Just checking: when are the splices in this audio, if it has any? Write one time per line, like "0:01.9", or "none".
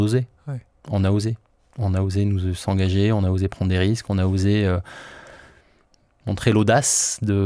none